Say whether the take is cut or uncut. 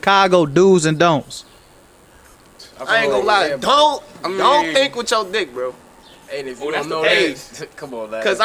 uncut